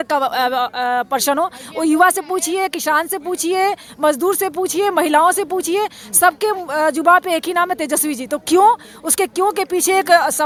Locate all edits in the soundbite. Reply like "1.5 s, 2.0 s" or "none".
none